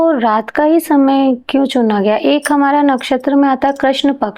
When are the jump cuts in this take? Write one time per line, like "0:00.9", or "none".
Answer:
none